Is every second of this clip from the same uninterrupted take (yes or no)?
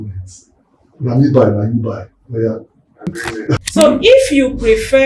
no